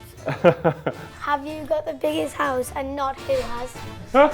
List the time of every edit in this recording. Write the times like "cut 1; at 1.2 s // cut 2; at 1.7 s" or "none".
cut 1; at 1.1 s